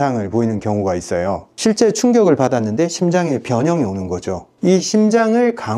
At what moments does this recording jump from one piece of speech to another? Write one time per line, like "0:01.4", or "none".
0:04.5